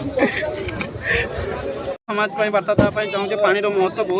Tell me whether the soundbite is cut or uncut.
cut